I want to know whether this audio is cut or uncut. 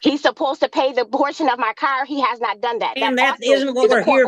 uncut